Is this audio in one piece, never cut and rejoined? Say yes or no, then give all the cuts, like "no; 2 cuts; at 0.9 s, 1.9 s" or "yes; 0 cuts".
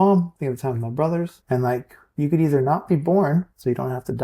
no; 1 cut; at 1.4 s